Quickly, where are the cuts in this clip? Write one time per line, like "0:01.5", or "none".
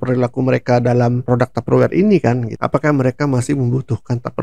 0:01.2
0:02.5